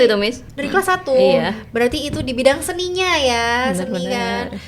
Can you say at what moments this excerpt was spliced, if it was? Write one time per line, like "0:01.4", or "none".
none